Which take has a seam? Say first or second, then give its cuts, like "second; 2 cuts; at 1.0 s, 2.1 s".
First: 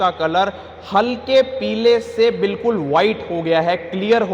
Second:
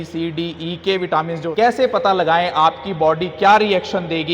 second; 1 cut; at 1.5 s